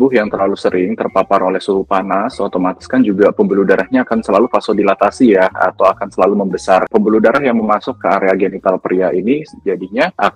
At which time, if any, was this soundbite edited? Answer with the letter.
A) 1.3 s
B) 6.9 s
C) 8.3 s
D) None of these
B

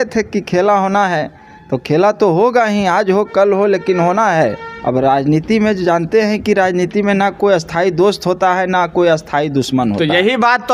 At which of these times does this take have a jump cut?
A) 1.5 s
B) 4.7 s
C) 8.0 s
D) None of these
B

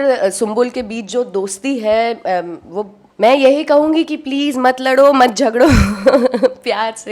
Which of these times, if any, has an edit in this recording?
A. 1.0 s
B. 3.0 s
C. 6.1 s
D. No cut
B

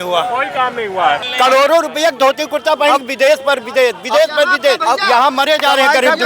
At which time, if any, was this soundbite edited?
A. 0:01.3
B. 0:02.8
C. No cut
A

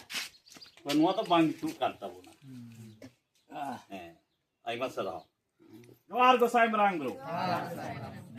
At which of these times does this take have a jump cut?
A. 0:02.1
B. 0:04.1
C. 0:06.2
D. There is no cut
C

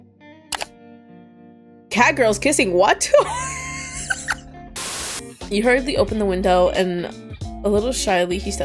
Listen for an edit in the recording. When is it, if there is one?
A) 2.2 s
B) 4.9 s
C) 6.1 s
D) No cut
B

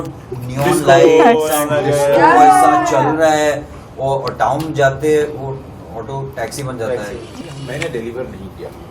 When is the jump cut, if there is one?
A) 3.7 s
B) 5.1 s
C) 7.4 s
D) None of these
C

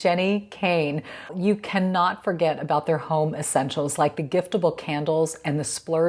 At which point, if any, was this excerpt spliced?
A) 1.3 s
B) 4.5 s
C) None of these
A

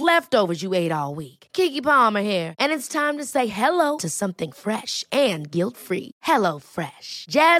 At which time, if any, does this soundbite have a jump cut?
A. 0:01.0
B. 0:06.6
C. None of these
C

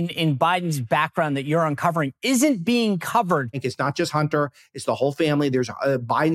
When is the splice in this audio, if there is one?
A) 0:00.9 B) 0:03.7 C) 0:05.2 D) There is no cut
B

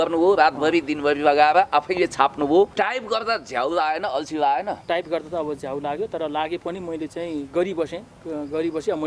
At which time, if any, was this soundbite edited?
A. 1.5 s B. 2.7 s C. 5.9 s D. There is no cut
B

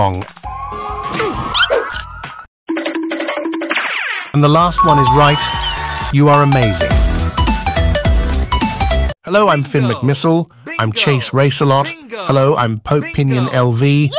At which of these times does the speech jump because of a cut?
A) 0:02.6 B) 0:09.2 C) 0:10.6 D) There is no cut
B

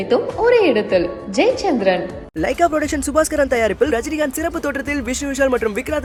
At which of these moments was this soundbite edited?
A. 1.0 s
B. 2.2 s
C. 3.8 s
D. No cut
D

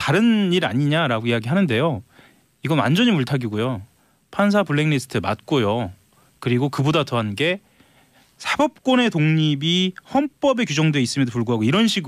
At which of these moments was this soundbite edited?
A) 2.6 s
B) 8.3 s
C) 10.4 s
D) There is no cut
B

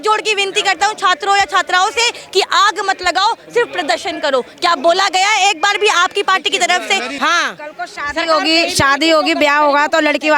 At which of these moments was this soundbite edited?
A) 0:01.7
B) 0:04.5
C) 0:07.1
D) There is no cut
C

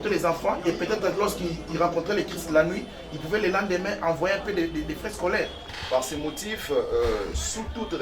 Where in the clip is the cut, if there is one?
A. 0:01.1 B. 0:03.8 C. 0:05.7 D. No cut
C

